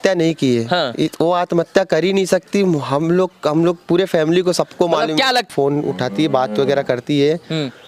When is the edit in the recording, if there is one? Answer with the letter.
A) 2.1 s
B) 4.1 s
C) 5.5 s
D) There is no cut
C